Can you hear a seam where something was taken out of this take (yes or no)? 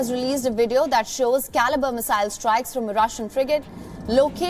no